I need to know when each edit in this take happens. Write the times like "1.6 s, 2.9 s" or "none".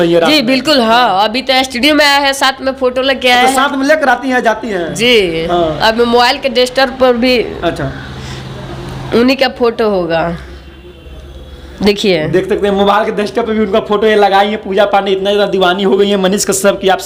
none